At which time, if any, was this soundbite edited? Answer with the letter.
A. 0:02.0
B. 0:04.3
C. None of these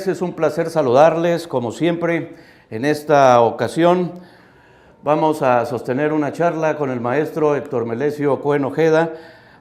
C